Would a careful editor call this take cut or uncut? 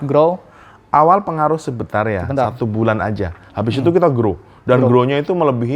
uncut